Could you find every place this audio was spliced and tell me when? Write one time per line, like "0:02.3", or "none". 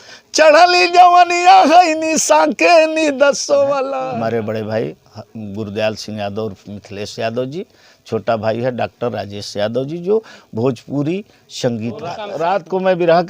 0:03.9
0:12.3